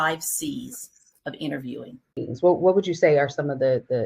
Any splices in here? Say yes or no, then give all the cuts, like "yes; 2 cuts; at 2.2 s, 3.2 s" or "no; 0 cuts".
yes; 1 cut; at 2.2 s